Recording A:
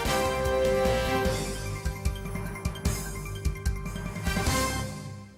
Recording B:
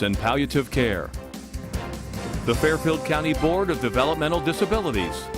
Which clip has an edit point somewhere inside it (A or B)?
B